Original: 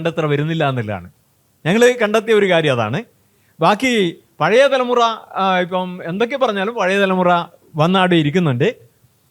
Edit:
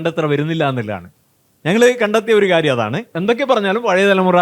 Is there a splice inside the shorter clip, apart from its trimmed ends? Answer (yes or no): yes